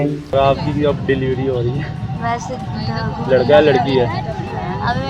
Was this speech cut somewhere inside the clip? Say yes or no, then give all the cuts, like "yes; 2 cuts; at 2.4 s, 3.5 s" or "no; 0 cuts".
no; 0 cuts